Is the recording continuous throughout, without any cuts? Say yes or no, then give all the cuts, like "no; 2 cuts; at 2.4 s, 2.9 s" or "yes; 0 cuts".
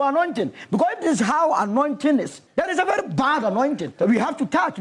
no; 2 cuts; at 2.4 s, 3.9 s